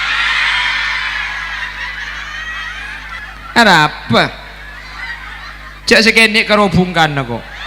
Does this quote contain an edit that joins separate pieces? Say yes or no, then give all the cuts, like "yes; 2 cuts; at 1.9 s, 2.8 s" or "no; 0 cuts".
yes; 1 cut; at 3.2 s